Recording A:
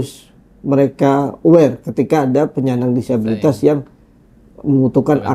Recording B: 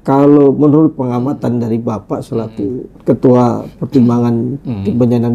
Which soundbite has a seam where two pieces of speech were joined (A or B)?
B